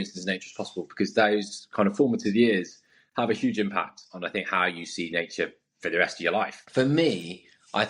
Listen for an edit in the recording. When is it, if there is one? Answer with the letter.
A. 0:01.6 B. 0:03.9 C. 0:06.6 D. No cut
C